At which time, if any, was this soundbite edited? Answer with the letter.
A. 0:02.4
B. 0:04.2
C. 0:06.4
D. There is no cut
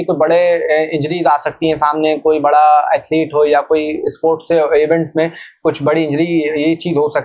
D